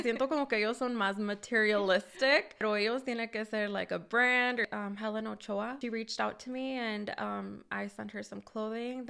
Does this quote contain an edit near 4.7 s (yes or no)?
yes